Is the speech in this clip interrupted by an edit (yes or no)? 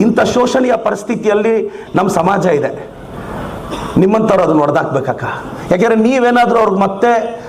yes